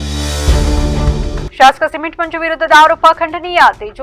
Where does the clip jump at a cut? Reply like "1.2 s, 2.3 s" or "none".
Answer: none